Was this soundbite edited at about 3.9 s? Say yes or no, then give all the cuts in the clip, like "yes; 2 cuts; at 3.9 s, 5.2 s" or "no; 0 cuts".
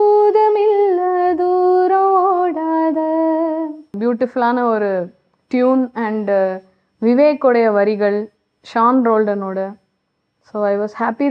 yes; 1 cut; at 3.9 s